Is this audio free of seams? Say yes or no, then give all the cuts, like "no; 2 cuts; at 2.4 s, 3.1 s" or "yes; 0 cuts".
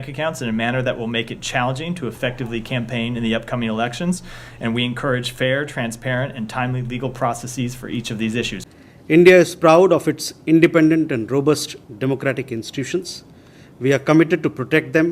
no; 1 cut; at 8.6 s